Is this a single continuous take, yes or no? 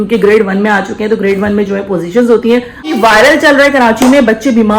no